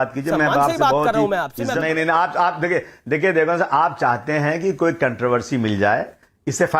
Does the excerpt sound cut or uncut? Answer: cut